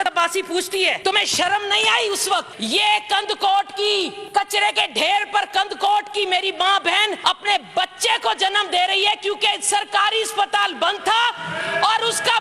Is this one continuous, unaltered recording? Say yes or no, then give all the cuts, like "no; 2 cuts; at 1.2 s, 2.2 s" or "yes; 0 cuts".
no; 4 cuts; at 1.0 s, 2.5 s, 4.2 s, 7.2 s